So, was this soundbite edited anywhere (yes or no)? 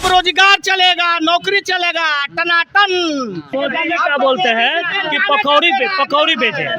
yes